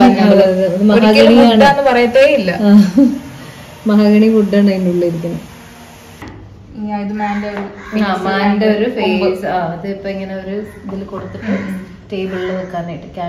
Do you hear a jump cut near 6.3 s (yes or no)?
yes